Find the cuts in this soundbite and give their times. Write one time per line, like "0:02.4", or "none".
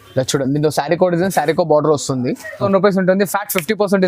0:02.6